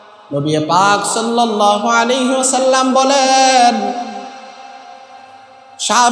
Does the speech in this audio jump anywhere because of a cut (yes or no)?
no